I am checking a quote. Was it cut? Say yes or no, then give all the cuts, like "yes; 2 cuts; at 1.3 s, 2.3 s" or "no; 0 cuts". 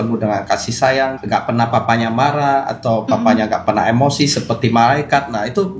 yes; 1 cut; at 1.2 s